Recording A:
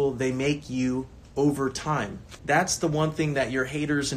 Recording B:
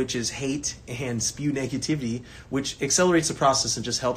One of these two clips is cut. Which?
A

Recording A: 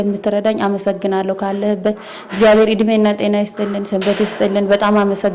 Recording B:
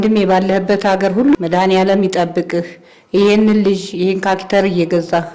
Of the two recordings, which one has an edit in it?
B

